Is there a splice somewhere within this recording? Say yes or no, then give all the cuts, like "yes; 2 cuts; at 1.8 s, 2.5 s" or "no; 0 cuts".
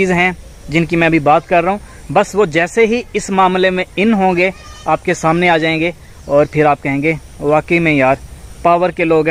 no; 0 cuts